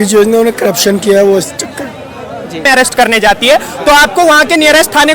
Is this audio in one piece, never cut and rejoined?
no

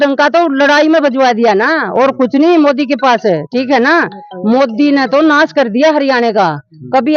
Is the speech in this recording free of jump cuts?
yes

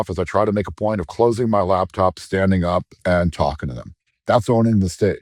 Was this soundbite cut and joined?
no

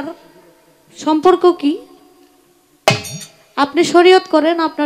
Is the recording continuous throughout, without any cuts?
yes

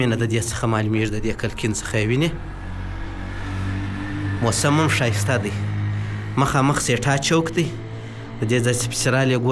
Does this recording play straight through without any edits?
yes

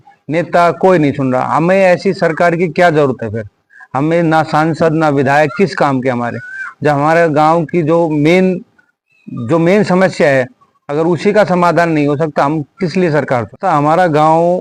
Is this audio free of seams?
yes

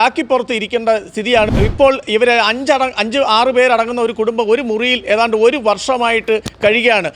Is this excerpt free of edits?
no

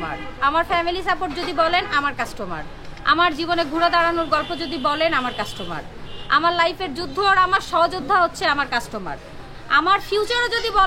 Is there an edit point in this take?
no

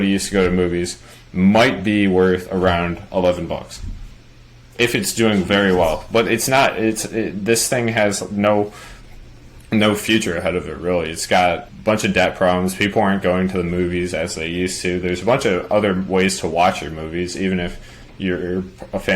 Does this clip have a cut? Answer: yes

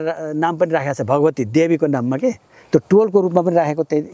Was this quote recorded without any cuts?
yes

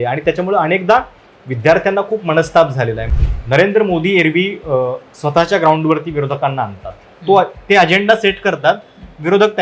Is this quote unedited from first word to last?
no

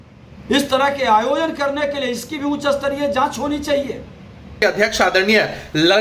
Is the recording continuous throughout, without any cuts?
no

